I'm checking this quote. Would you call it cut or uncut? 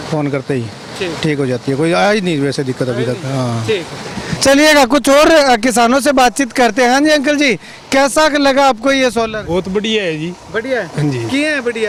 uncut